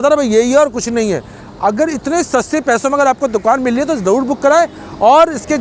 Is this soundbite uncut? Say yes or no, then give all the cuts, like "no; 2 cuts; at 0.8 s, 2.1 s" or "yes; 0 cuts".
yes; 0 cuts